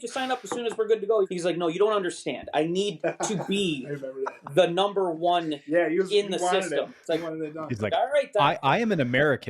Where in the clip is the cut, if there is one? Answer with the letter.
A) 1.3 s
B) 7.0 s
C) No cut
A